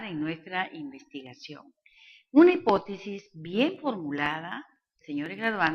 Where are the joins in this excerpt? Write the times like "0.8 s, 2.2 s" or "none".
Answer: 3.7 s